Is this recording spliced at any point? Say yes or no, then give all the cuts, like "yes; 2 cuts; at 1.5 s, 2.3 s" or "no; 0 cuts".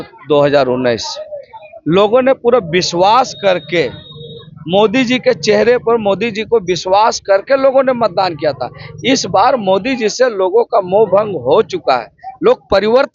no; 0 cuts